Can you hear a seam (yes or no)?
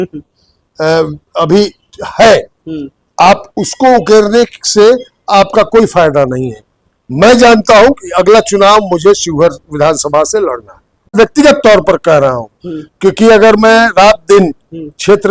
yes